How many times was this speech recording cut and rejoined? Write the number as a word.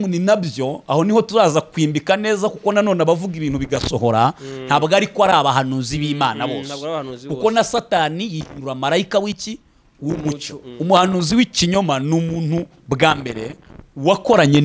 one